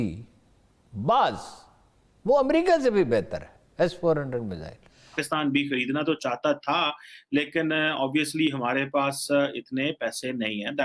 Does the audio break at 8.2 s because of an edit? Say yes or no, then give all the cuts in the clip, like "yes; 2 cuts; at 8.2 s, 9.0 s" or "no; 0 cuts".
no; 1 cut; at 5.2 s